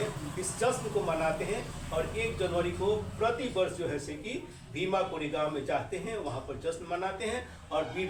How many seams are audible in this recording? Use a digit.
0